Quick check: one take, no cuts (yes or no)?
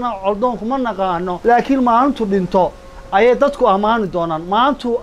no